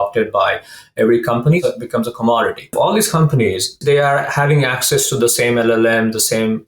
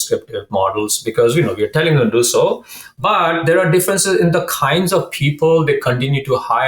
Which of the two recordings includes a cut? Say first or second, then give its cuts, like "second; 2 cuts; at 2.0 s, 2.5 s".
first; 3 cuts; at 1.6 s, 2.7 s, 3.7 s